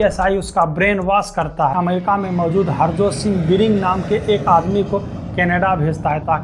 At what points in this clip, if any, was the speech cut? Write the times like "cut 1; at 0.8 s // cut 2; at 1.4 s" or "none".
cut 1; at 1.7 s